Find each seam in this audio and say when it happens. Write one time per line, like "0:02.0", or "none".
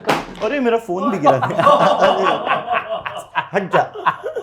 none